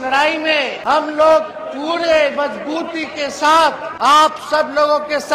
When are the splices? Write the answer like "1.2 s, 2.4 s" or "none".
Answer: 0.9 s, 4.3 s